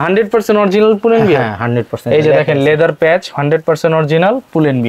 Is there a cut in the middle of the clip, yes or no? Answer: no